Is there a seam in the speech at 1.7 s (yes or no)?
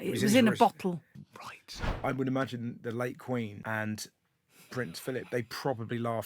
yes